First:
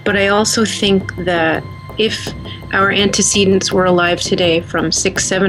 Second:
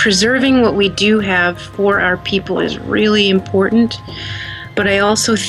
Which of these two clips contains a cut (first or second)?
first